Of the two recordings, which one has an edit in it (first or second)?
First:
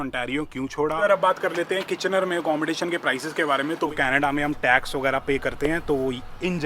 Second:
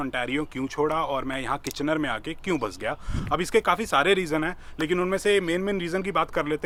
first